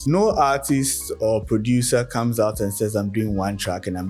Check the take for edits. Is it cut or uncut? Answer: uncut